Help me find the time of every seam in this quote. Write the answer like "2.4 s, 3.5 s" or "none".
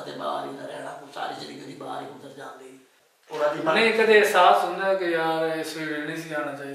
2.9 s